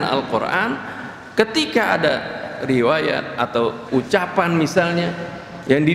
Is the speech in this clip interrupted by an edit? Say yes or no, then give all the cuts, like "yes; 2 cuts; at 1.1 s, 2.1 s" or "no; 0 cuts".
yes; 1 cut; at 3.8 s